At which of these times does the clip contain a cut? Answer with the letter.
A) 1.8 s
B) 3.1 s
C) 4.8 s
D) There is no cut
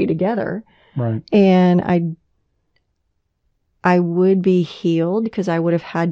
D